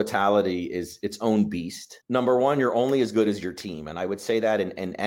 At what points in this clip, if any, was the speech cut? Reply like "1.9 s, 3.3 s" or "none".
0.9 s